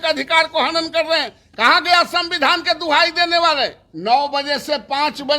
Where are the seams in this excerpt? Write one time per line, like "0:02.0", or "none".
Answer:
0:03.9